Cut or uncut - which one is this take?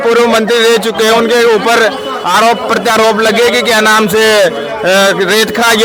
uncut